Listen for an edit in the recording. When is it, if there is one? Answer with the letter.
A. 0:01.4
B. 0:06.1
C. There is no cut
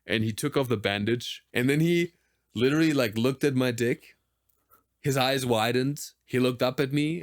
A